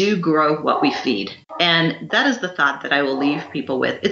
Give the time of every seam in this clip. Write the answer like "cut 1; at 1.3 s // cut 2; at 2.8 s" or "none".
cut 1; at 1.4 s